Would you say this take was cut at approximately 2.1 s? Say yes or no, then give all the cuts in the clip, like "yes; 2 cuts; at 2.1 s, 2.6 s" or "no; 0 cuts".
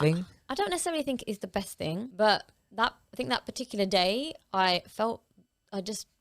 yes; 1 cut; at 2.1 s